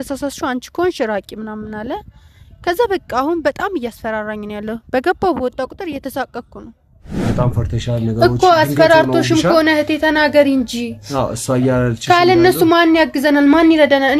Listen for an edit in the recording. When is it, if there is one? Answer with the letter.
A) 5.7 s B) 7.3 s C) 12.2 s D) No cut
B